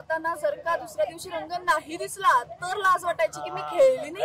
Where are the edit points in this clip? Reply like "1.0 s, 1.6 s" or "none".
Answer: none